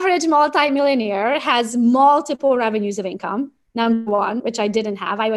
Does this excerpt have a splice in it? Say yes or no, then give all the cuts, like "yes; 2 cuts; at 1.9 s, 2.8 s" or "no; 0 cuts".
no; 0 cuts